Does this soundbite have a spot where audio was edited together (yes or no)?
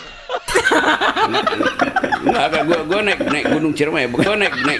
no